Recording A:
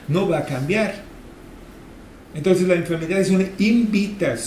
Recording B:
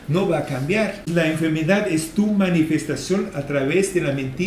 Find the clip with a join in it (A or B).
B